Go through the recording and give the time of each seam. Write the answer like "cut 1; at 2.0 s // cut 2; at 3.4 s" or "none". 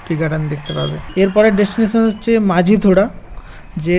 cut 1; at 1.0 s